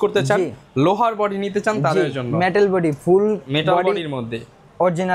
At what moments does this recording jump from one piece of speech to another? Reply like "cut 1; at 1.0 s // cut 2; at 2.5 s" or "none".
none